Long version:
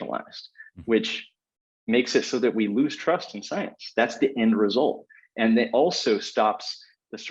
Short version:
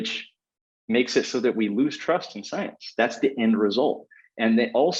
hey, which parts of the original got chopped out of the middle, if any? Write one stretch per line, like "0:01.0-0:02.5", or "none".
none

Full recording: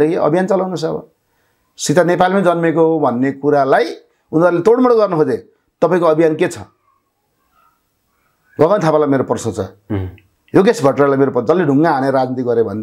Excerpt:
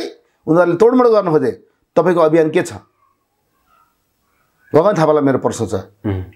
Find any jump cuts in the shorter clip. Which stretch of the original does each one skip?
none

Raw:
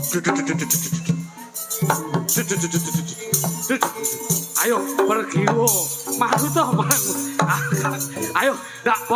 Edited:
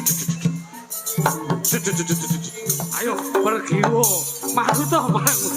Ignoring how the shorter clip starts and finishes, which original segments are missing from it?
0:03.5-0:04.5

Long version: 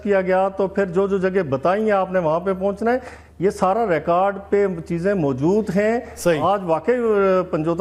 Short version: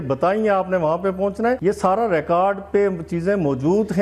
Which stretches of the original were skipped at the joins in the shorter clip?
0:03.0-0:03.4

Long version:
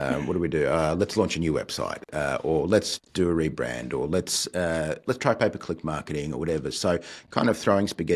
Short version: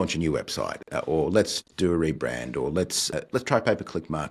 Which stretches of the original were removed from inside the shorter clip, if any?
0:02.1-0:02.3
0:04.5-0:04.9

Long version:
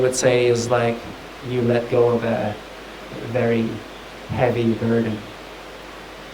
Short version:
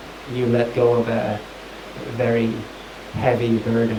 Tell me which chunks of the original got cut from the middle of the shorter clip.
none

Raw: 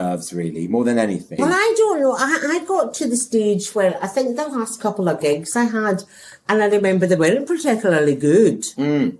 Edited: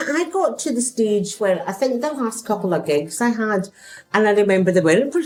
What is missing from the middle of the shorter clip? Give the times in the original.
none

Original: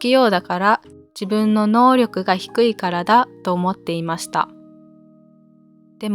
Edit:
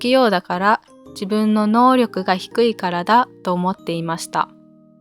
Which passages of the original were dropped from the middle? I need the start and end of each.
none

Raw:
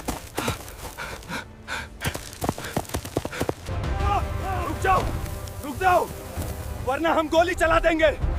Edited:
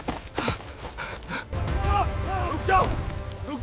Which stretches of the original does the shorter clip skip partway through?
0:01.5-0:03.7

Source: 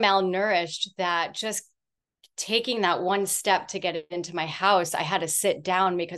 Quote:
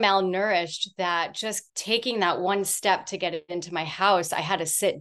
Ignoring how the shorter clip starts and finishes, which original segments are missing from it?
0:01.7-0:02.3

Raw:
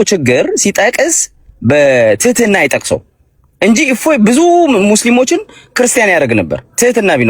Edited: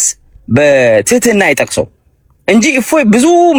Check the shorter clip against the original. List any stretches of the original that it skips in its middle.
none

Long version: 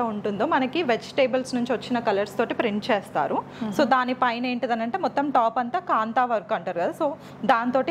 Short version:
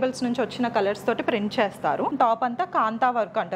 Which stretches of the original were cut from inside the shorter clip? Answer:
0:03.4-0:05.3

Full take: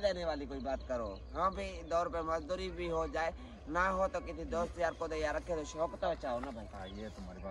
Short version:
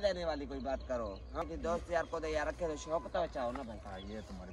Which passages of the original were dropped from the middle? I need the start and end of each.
0:01.4-0:04.2

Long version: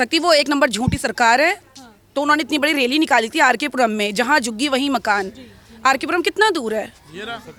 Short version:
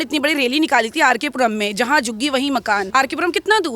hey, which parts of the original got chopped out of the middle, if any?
0:05.3-0:05.8

